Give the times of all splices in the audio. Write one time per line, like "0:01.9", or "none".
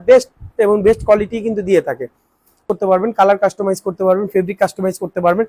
0:02.6